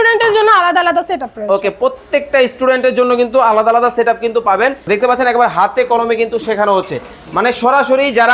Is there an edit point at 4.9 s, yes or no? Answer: yes